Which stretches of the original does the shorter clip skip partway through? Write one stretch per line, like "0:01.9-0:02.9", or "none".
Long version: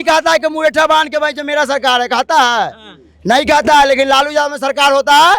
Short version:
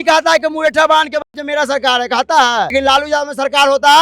0:02.7-0:04.0